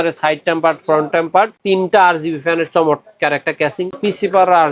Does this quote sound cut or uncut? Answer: cut